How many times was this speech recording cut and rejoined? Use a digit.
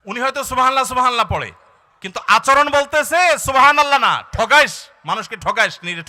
0